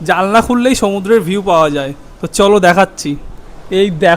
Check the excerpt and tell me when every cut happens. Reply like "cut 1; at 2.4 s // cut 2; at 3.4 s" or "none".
none